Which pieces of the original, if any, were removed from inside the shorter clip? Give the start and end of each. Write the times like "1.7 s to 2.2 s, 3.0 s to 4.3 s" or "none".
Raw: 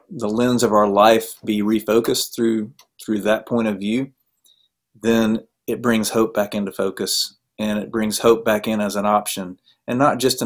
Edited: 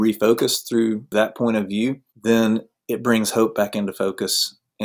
2.8 s to 3.2 s, 4.2 s to 4.9 s